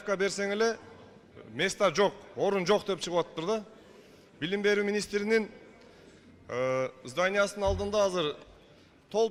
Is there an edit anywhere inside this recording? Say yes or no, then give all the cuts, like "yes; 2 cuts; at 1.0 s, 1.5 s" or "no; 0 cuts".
no; 0 cuts